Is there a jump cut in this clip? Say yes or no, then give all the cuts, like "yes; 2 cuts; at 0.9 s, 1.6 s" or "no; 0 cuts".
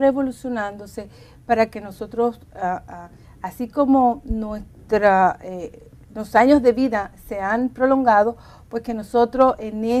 yes; 1 cut; at 8.0 s